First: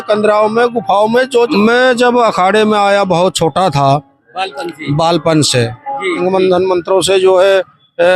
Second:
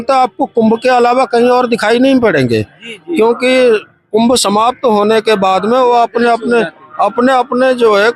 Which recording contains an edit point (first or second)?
first